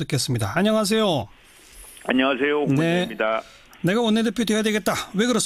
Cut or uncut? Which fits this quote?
uncut